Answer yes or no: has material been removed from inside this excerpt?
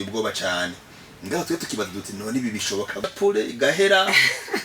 yes